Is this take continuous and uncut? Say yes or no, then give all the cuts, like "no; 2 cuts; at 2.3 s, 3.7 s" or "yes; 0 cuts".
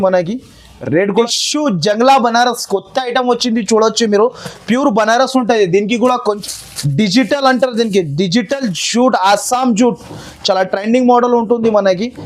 no; 2 cuts; at 1.1 s, 6.2 s